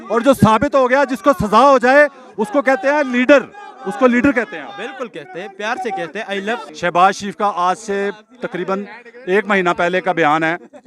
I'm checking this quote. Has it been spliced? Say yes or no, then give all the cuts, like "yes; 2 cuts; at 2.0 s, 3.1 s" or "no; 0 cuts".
yes; 1 cut; at 6.7 s